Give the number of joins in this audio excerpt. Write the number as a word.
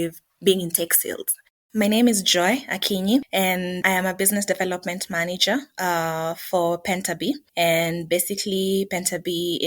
one